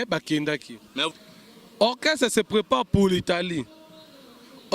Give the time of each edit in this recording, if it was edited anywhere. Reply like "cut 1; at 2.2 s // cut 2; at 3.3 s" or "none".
cut 1; at 1.1 s